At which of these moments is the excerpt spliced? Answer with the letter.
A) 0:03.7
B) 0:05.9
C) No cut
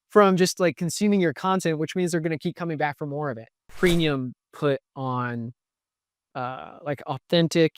A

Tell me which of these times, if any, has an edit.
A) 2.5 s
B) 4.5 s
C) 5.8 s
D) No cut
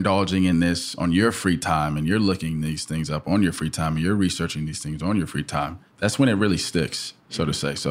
C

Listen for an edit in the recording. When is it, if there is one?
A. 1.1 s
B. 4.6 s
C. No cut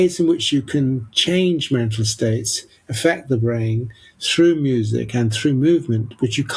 C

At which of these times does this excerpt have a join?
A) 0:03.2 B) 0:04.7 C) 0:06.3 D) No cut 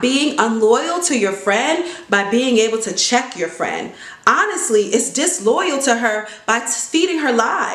D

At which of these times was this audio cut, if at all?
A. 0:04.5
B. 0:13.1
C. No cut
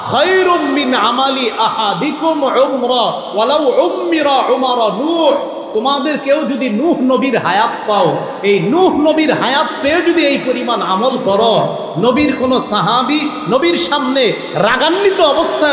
C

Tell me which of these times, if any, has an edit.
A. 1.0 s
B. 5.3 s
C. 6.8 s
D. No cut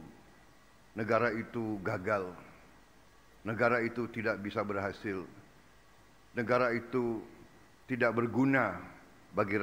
B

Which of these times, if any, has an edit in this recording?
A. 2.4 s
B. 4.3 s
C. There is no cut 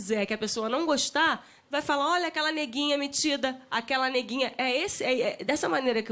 C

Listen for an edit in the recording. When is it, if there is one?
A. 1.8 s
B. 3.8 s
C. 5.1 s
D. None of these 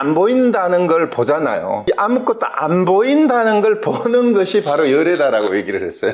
A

